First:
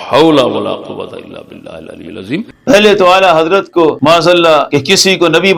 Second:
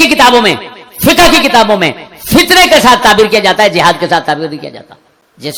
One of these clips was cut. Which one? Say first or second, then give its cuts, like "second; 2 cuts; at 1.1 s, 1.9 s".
first; 3 cuts; at 2.5 s, 4.0 s, 4.7 s